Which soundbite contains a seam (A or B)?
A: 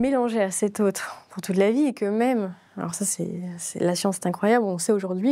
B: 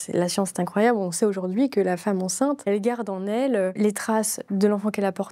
B